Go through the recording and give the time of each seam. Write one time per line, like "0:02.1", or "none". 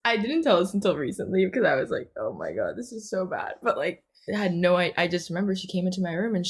0:03.9